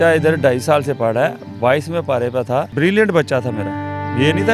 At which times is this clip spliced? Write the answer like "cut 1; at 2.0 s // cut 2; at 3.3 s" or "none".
cut 1; at 2.7 s